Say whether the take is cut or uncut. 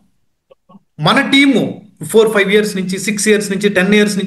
uncut